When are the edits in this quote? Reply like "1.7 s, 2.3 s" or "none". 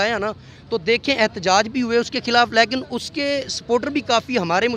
none